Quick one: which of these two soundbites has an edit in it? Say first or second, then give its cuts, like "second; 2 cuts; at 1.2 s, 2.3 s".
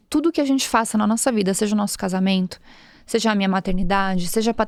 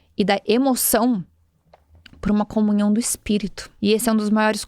second; 1 cut; at 3.6 s